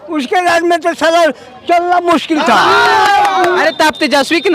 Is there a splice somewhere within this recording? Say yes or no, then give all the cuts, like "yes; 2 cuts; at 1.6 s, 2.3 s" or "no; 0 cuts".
yes; 1 cut; at 3.6 s